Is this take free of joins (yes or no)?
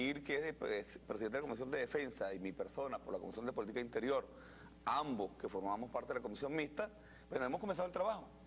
yes